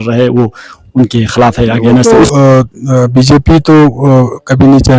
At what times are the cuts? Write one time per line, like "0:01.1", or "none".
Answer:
0:02.3